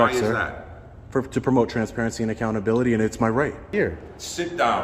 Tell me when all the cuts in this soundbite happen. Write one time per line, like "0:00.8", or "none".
0:03.7